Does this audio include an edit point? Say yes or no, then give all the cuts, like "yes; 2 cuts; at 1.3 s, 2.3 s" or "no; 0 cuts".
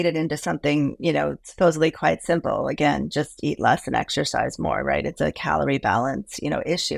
no; 0 cuts